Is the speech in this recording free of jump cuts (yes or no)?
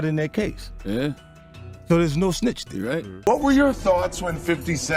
no